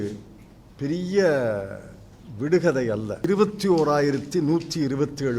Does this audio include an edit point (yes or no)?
yes